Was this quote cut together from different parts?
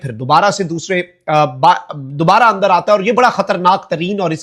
no; 0 cuts

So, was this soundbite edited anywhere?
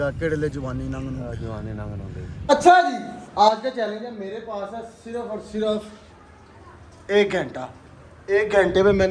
yes; 1 cut; at 2.5 s

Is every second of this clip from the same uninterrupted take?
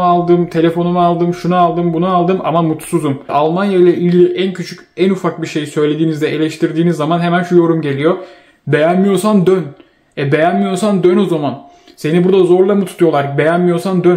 no; 1 cut; at 3.3 s

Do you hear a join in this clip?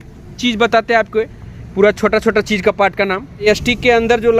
yes; 1 cut; at 3.5 s

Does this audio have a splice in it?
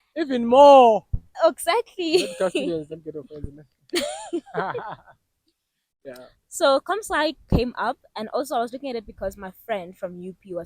no; 0 cuts

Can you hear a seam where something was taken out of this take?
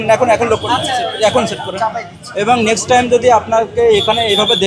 no; 0 cuts

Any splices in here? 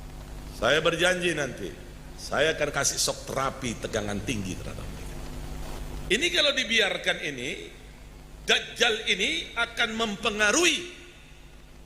yes; 1 cut; at 5.7 s

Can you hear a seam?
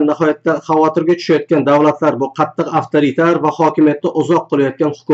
no; 0 cuts

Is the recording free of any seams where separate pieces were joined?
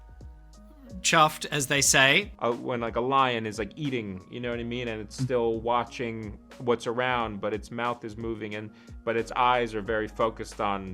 no; 1 cut; at 2.3 s

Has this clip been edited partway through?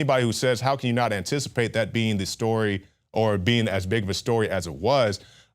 yes; 1 cut; at 4.2 s

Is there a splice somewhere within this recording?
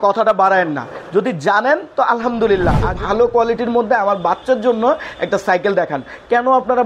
yes; 1 cut; at 3.0 s

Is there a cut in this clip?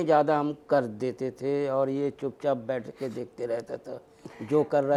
no; 0 cuts

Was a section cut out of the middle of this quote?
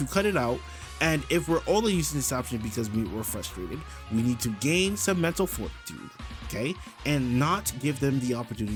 no; 0 cuts

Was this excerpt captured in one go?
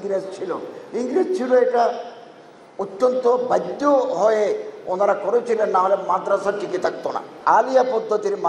no; 1 cut; at 7.3 s

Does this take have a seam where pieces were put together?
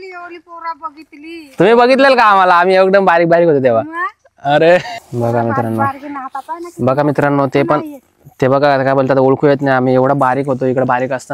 yes; 1 cut; at 5.0 s

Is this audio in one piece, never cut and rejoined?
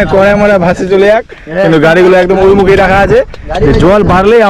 yes; 0 cuts

